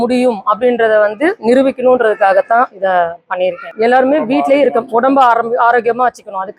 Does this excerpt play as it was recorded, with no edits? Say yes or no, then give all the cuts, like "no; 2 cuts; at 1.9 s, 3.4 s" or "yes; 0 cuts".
no; 1 cut; at 3.7 s